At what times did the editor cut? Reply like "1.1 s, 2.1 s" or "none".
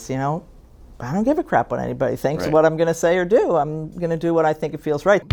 none